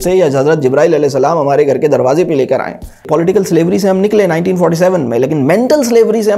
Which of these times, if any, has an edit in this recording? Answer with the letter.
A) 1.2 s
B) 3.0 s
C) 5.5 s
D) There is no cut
B